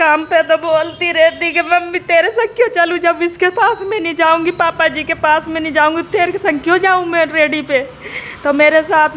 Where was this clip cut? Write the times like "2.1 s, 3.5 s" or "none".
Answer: none